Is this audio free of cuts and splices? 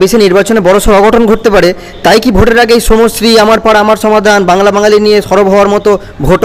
yes; 0 cuts

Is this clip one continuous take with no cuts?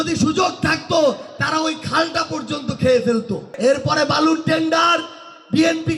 no; 1 cut; at 3.5 s

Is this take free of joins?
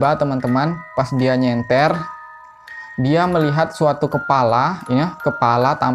yes; 0 cuts

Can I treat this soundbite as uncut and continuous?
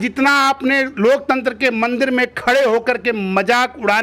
yes; 0 cuts

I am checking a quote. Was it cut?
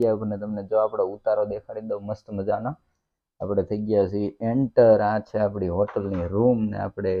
no; 0 cuts

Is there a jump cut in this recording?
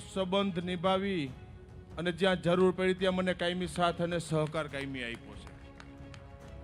yes; 1 cut; at 5.4 s

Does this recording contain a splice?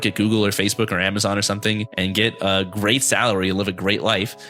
yes; 1 cut; at 1.9 s

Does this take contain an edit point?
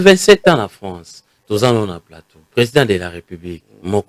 yes; 1 cut; at 2.5 s

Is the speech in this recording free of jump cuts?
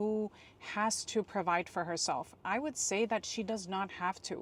yes; 0 cuts

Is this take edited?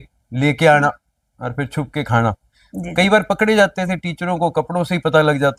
no; 0 cuts

